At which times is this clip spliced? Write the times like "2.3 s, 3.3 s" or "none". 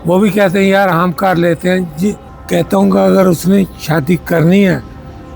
2.3 s